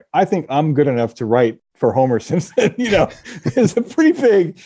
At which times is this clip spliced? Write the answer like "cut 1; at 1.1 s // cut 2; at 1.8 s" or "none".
none

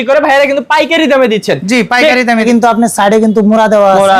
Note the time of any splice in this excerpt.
cut 1; at 2.4 s

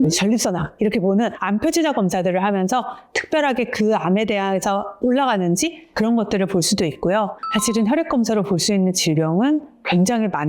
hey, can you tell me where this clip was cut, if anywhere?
cut 1; at 7.4 s

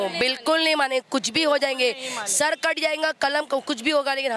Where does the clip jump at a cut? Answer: none

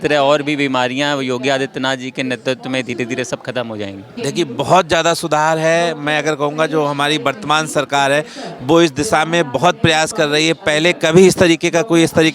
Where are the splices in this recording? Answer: cut 1; at 4.1 s

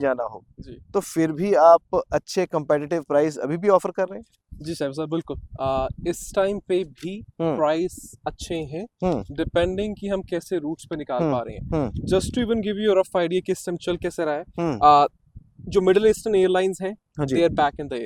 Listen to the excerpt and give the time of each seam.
none

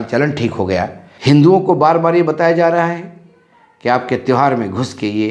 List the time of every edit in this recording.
cut 1; at 1.1 s

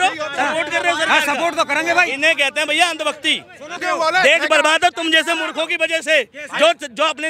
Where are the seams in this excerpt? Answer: cut 1; at 3.8 s

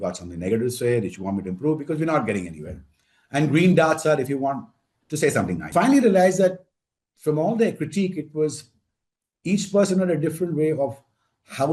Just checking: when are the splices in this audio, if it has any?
cut 1; at 5.7 s

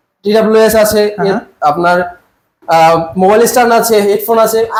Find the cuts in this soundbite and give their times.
none

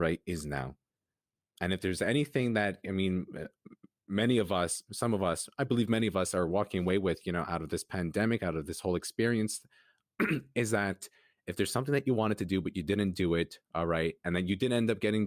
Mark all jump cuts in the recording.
cut 1; at 1.4 s

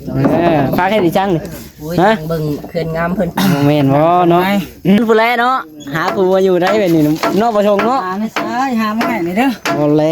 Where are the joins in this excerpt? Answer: cut 1; at 5.0 s

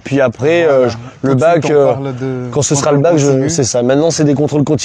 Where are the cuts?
none

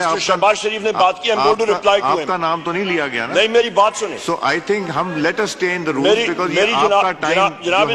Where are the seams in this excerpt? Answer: none

